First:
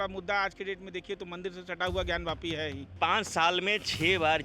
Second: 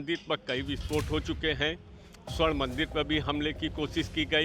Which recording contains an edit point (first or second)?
first